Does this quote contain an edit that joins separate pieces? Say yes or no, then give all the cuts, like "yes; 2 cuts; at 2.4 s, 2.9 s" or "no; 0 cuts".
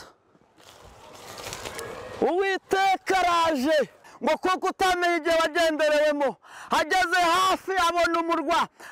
yes; 1 cut; at 4.1 s